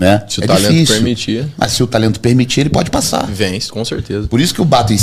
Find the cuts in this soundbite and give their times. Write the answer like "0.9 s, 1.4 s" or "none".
none